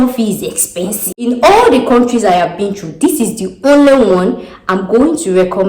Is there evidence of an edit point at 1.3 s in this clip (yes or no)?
yes